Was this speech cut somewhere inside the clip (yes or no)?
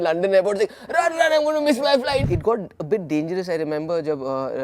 yes